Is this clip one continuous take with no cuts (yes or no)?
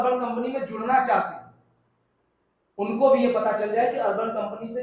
yes